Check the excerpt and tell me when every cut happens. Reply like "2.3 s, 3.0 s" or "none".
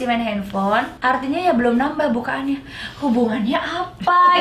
0.9 s